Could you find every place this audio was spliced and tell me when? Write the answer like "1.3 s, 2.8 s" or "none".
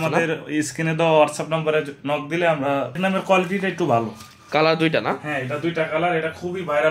3.0 s